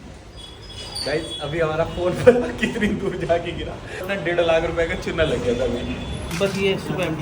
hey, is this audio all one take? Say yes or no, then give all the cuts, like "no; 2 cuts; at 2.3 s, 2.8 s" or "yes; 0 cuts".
no; 2 cuts; at 4.0 s, 6.2 s